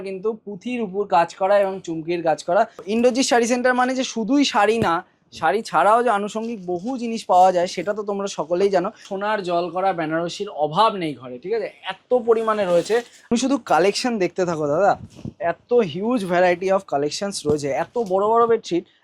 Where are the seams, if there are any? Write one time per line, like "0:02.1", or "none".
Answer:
0:02.8
0:09.1
0:13.3